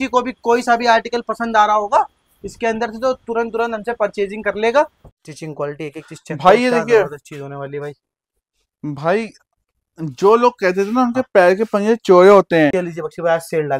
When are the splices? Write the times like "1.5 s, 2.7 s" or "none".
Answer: 5.1 s, 12.7 s